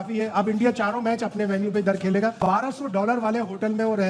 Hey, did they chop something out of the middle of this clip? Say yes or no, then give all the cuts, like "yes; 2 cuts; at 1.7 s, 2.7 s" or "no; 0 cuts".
yes; 1 cut; at 2.4 s